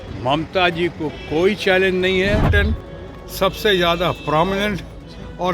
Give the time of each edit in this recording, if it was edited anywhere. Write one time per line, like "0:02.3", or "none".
0:02.5